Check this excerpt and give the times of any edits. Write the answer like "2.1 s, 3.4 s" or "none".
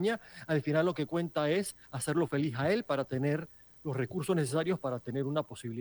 none